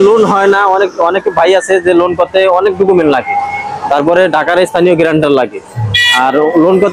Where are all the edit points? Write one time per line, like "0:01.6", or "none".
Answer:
none